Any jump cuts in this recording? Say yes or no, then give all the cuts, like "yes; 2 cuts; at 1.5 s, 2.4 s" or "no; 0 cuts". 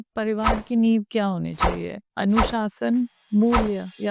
no; 0 cuts